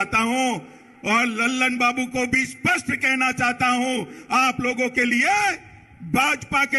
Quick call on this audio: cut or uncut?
uncut